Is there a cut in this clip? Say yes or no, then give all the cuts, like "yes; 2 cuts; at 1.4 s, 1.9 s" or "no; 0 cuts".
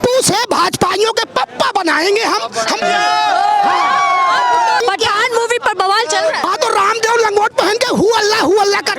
yes; 3 cuts; at 2.8 s, 4.8 s, 6.4 s